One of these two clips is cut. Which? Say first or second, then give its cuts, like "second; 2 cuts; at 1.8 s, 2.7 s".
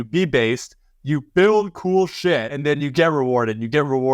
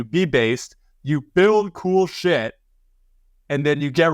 first; 1 cut; at 2.5 s